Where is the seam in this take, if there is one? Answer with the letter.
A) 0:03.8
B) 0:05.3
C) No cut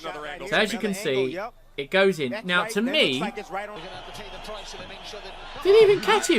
A